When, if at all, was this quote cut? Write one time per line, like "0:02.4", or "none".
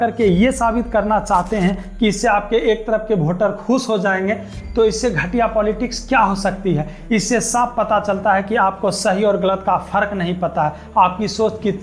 none